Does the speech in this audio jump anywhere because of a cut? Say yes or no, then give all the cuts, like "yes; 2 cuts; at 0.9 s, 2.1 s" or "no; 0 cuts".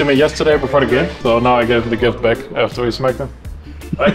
yes; 1 cut; at 1.1 s